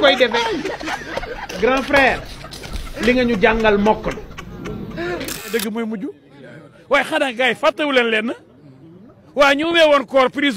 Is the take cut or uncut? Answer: cut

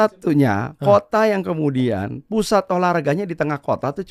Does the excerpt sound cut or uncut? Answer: uncut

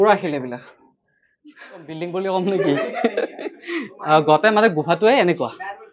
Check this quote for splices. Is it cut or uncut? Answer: cut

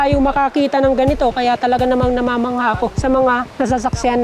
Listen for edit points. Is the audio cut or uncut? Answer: cut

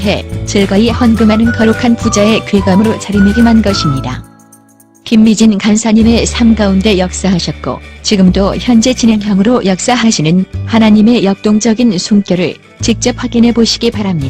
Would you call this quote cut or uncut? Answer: cut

